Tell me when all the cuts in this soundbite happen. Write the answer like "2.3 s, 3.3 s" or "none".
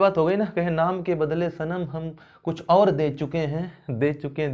none